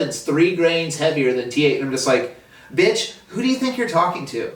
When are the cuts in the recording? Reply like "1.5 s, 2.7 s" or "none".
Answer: none

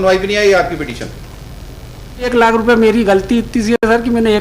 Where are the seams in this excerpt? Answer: 2.3 s

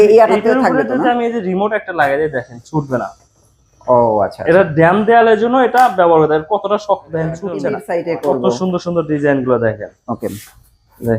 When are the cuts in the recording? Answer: 7.6 s

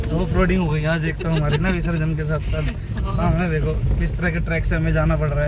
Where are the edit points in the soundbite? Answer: none

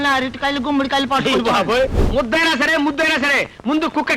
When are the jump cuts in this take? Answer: 2.0 s

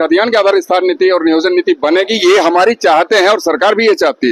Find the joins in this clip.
none

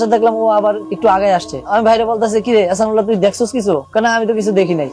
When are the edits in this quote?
none

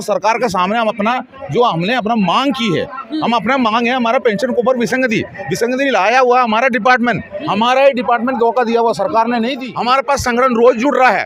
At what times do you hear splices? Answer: 9.6 s

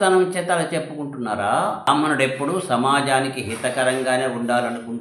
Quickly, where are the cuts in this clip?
1.9 s

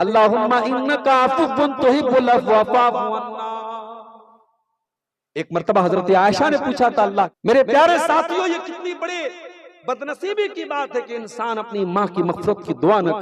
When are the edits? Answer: 7.3 s

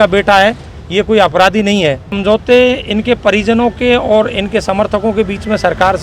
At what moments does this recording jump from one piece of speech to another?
2.2 s

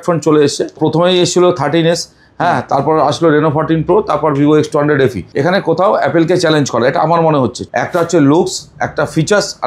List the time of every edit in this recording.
0.8 s, 5.2 s, 7.6 s

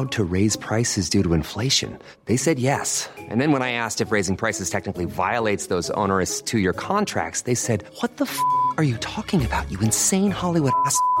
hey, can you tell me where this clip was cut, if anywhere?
none

